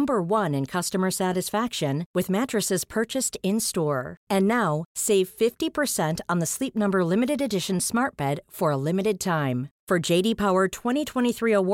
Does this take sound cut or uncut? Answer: uncut